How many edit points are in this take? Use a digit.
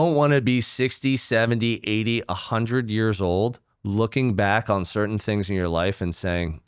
0